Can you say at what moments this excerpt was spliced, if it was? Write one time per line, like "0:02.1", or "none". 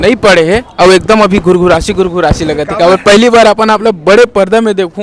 none